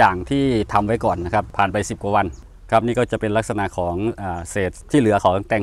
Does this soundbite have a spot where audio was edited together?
yes; 3 cuts; at 1.5 s, 2.4 s, 4.8 s

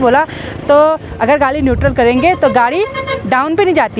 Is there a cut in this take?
no; 0 cuts

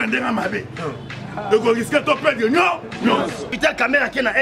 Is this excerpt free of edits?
no; 1 cut; at 3.5 s

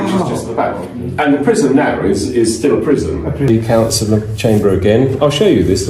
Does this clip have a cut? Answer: yes; 1 cut; at 3.5 s

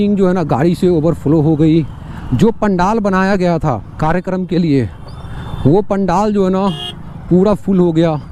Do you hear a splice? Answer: no; 0 cuts

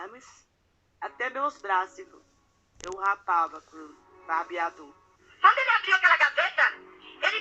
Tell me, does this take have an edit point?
yes; 1 cut; at 5.2 s

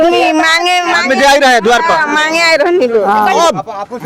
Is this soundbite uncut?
yes; 0 cuts

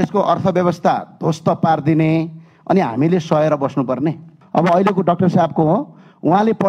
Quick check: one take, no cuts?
no; 1 cut; at 4.3 s

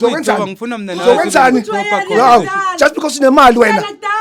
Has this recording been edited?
no; 0 cuts

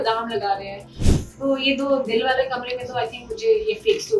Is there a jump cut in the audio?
yes; 1 cut; at 1.1 s

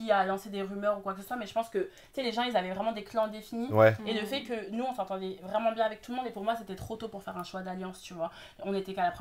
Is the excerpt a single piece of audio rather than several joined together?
yes; 0 cuts

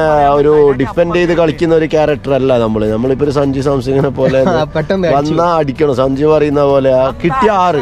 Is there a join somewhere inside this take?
no; 0 cuts

